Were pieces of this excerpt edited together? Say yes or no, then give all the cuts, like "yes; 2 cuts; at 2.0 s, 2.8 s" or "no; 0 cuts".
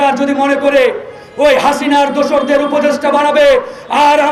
no; 0 cuts